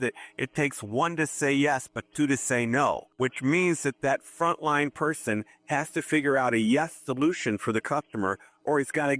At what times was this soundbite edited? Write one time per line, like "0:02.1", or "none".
0:03.1

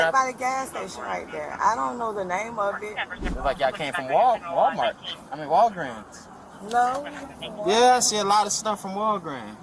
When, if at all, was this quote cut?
0:03.2

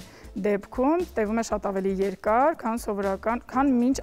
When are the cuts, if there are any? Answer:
none

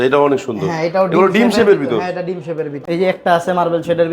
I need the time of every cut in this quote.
0:02.8

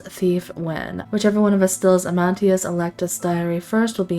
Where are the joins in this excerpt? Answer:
0:00.9

